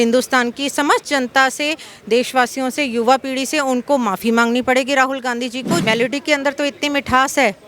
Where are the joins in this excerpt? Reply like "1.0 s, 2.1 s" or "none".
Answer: 5.8 s